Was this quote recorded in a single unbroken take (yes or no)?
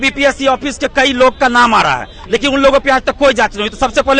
yes